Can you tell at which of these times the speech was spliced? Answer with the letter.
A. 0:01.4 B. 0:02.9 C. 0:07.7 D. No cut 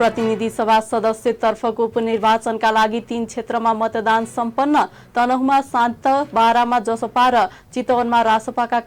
D